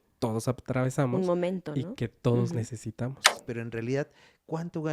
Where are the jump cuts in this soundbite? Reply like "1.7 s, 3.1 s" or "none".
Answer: 3.4 s